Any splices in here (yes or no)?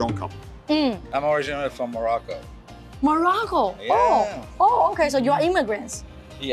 no